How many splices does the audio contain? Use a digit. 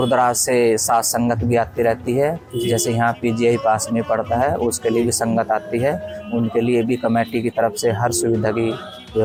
0